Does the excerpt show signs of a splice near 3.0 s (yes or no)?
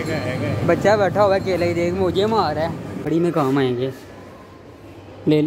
yes